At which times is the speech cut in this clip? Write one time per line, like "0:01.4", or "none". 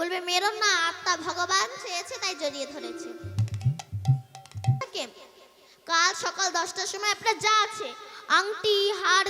0:04.8

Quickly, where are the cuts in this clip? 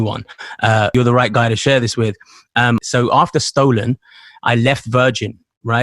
0:00.9
0:02.8

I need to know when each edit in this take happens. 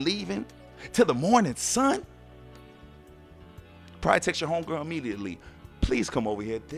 0:02.5
0:04.0

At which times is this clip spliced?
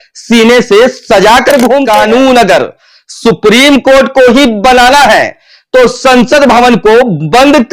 0:01.8

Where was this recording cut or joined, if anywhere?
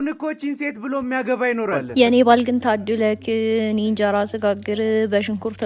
0:01.8

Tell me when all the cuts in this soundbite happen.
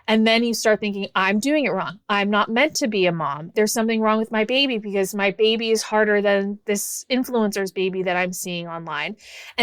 0:03.5

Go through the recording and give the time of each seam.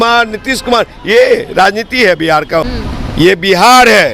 0:02.8

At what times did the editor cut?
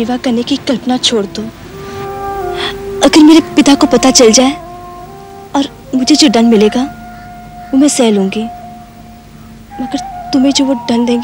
0:02.6

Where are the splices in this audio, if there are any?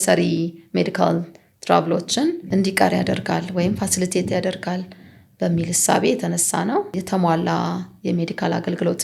0:02.4
0:07.0

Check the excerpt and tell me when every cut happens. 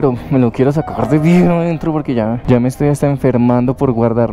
none

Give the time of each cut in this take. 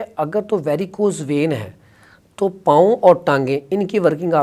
none

